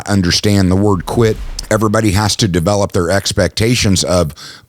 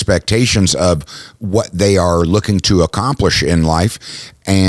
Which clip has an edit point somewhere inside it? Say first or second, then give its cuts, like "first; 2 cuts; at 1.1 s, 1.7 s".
first; 1 cut; at 1.5 s